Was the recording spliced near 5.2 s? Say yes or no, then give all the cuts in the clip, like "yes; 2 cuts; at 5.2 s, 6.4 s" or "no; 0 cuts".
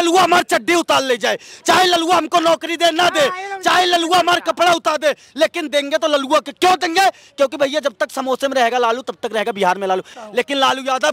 no; 1 cut; at 10.2 s